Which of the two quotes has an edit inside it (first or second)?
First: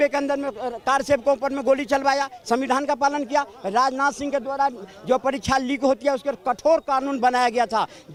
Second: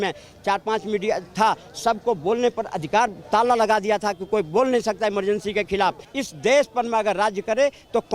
second